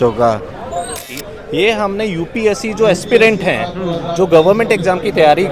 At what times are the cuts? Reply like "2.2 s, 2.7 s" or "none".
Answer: 1.0 s